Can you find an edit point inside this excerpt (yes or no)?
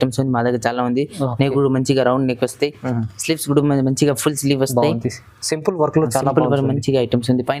no